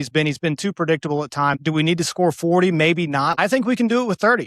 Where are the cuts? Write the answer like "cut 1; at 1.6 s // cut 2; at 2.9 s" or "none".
cut 1; at 1.6 s // cut 2; at 3.4 s